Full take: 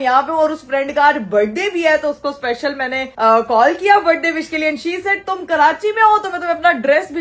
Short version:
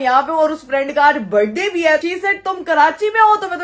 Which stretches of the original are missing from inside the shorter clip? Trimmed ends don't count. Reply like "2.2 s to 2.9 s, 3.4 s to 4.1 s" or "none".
2.0 s to 4.8 s

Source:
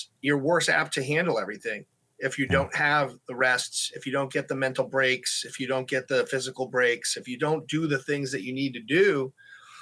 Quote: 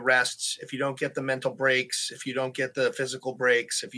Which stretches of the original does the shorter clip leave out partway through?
none

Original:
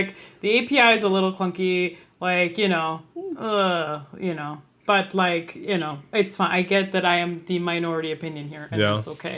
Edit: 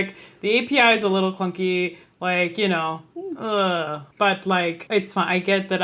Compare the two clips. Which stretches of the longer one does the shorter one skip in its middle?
4.0 s to 4.7 s, 5.5 s to 6.0 s

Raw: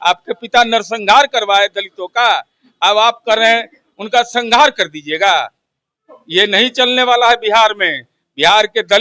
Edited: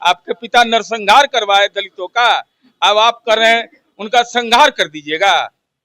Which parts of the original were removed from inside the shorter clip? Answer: none

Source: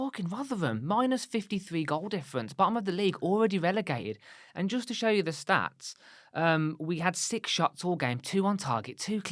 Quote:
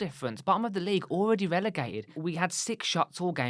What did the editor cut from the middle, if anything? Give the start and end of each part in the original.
4.3 s to 6.8 s

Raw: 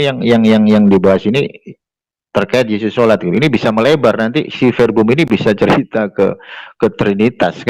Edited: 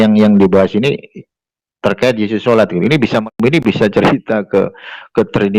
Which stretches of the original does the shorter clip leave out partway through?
3.8 s to 5.0 s

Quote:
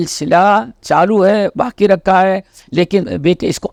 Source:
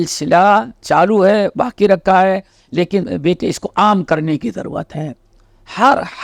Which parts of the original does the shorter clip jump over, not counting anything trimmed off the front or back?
none

